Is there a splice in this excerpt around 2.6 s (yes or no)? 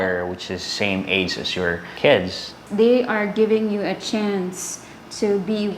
yes